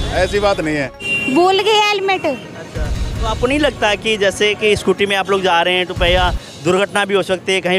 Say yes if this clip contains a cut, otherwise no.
yes